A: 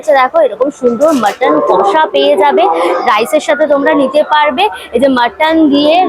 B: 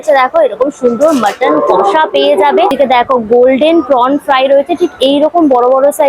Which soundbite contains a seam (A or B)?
B